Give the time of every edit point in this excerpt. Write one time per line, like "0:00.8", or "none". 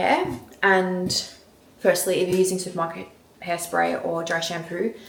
none